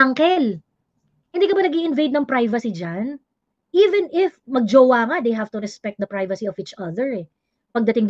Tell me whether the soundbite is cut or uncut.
uncut